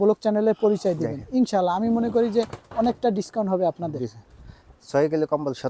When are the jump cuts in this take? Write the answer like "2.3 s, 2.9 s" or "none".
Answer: none